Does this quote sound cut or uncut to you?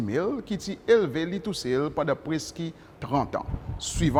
uncut